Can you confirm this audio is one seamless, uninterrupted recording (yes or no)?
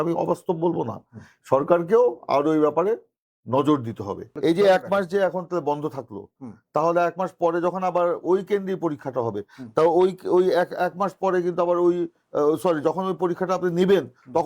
no